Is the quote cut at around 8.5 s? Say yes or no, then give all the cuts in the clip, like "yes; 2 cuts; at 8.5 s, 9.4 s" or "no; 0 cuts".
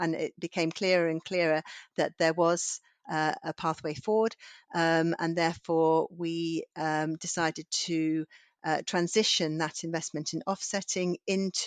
no; 0 cuts